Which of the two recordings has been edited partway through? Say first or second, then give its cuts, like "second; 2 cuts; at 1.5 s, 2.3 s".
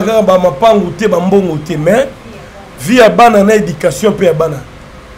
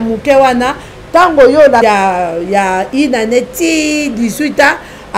second; 1 cut; at 1.8 s